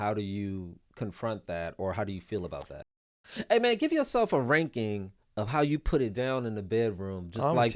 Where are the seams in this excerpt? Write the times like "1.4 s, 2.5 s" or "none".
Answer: 2.8 s